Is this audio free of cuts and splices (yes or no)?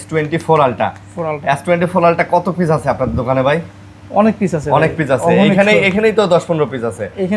yes